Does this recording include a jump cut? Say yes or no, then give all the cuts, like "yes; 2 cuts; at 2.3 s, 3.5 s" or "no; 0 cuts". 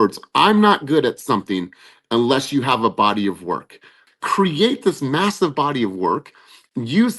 yes; 1 cut; at 4.0 s